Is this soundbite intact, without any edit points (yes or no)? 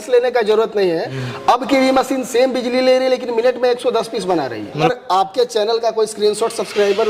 no